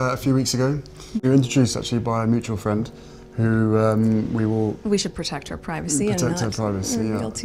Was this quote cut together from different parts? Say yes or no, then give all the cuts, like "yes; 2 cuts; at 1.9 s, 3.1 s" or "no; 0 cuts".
yes; 1 cut; at 1.2 s